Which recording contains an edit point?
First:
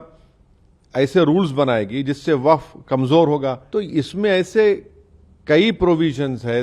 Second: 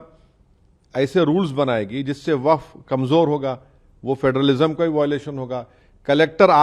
first; 1 cut; at 3.6 s

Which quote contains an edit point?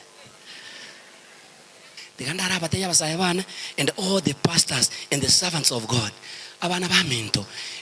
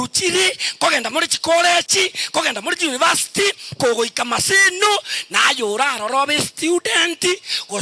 first; 1 cut; at 2.0 s

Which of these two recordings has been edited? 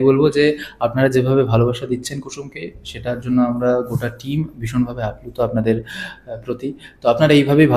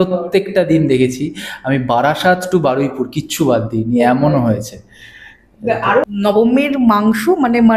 second; 1 cut; at 6.0 s

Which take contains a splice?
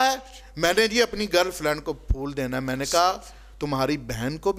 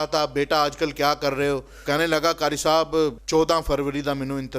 second; 2 cuts; at 1.7 s, 3.2 s

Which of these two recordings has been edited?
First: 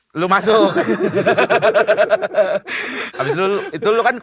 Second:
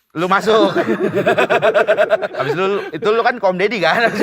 second; 1 cut; at 2.3 s

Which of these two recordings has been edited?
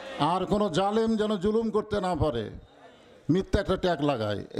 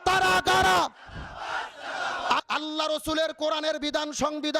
second; 1 cut; at 2.4 s

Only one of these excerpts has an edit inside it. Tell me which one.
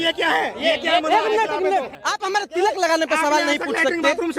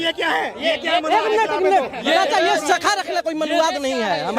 first; 1 cut; at 1.9 s

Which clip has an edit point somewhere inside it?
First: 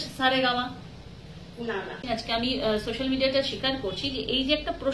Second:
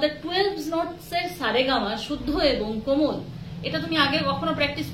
first; 1 cut; at 2.0 s

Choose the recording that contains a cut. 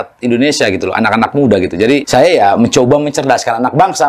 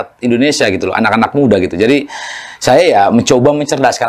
first; 1 cut; at 2.1 s

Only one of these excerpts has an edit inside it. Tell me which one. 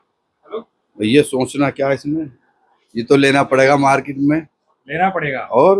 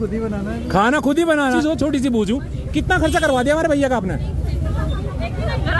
second; 1 cut; at 1.6 s

